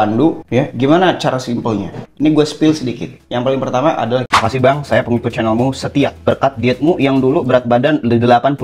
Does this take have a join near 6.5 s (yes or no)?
no